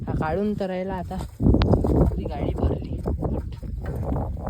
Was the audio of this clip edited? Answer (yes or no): no